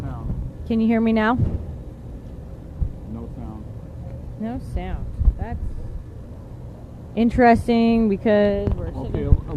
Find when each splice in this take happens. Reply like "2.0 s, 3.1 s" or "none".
3.9 s